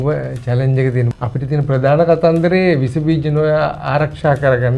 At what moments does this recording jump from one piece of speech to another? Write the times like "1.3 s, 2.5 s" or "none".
1.1 s